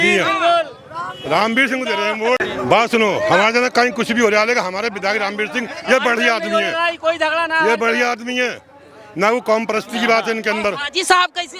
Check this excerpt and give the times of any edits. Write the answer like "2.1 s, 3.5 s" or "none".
none